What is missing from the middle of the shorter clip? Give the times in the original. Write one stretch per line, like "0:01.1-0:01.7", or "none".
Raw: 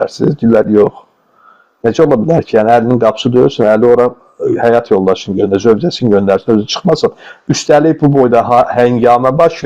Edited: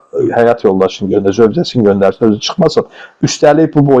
none